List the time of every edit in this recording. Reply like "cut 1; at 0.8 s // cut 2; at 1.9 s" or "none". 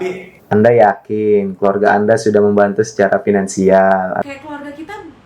cut 1; at 4.2 s